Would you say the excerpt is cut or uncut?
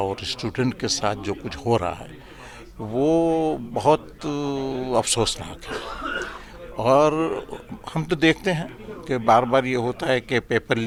uncut